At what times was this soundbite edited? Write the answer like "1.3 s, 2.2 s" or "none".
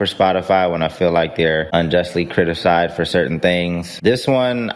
1.7 s, 3.9 s